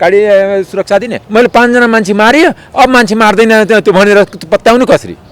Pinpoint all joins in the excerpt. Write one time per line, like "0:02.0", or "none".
0:01.2